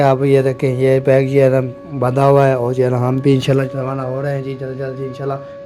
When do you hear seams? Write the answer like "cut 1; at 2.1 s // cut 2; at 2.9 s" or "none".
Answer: none

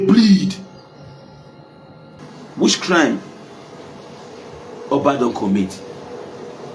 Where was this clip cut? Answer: cut 1; at 2.2 s

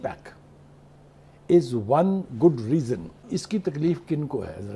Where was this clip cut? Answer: cut 1; at 3.3 s

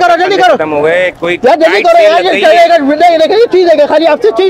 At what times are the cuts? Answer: none

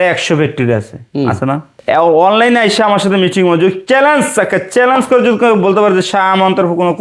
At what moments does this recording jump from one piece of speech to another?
cut 1; at 1.7 s

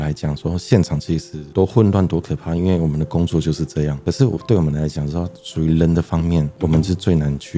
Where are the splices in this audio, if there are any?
none

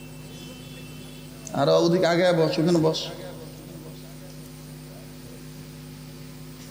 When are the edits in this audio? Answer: none

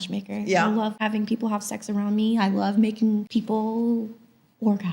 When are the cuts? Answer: cut 1; at 1.0 s // cut 2; at 3.3 s

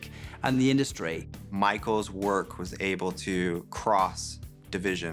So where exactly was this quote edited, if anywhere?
cut 1; at 1.4 s

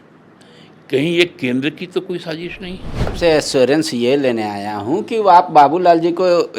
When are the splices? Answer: cut 1; at 3.1 s

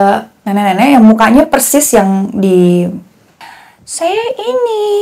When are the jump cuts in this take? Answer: cut 1; at 3.3 s

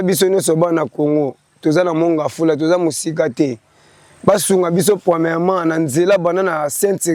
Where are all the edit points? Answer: none

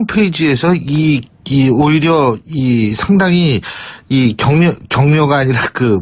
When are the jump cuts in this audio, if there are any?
none

